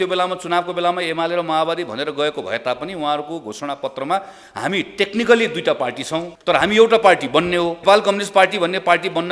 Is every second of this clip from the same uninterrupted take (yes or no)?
no